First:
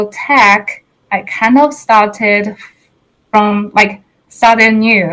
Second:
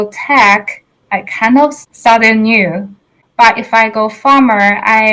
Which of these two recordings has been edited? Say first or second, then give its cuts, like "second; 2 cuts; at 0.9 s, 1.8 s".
second; 2 cuts; at 1.8 s, 3.2 s